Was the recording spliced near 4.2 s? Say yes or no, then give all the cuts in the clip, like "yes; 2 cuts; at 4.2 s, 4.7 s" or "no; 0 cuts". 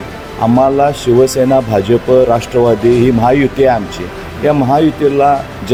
no; 0 cuts